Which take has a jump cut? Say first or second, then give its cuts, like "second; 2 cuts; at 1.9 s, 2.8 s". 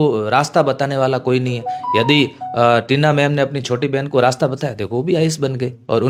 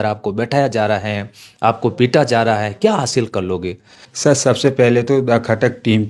second; 1 cut; at 4.2 s